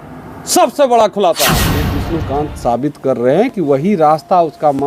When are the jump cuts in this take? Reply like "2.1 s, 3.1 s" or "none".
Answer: 2.0 s